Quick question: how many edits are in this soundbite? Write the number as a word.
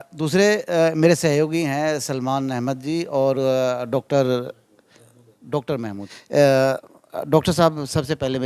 two